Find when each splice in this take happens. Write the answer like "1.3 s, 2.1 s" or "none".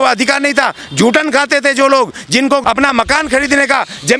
2.6 s